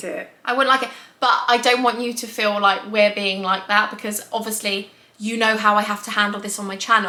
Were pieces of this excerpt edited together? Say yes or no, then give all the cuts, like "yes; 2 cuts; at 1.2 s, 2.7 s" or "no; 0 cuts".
no; 0 cuts